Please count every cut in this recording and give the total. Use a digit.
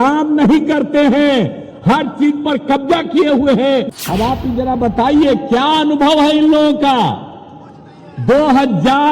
1